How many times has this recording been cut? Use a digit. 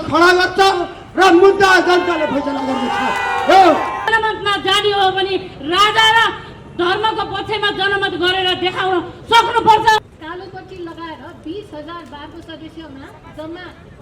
2